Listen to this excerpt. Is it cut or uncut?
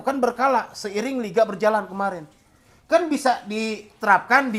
uncut